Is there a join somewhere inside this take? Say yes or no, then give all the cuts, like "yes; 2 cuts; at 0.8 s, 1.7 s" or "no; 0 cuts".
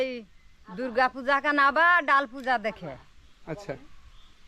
no; 0 cuts